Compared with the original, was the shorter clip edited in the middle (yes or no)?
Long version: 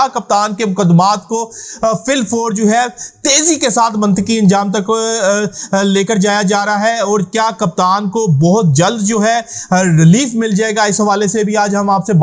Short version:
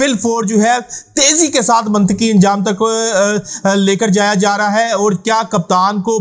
no